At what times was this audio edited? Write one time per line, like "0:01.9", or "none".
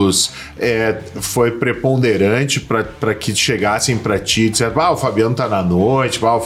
none